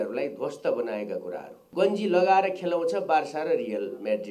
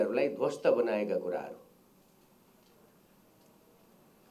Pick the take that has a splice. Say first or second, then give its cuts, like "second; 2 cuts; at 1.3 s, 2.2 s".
first; 1 cut; at 1.7 s